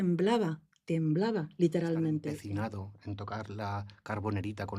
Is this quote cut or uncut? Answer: cut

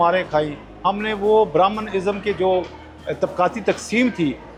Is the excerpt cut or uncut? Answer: uncut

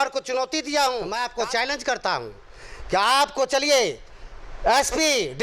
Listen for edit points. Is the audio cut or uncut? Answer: cut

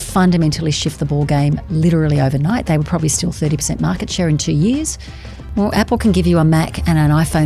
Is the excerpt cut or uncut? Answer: cut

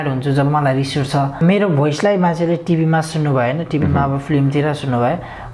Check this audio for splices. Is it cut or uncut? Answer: cut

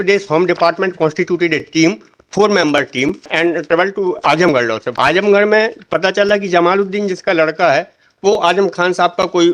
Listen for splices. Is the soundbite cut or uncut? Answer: cut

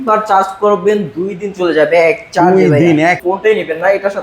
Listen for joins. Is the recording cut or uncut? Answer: cut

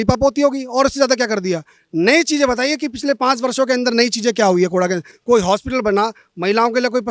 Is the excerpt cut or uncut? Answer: uncut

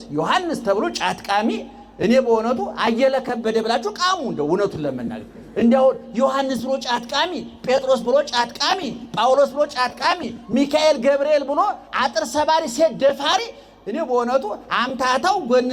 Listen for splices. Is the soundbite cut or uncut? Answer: uncut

